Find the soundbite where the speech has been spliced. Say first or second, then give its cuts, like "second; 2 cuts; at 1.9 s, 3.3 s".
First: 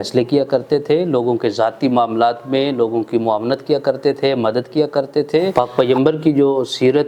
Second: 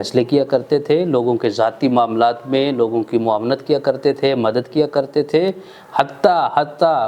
first; 1 cut; at 5.5 s